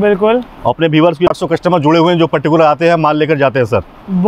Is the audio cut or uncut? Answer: cut